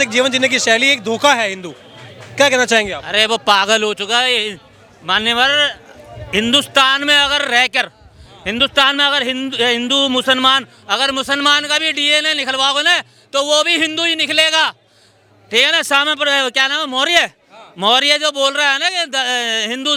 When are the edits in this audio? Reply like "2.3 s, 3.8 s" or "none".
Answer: none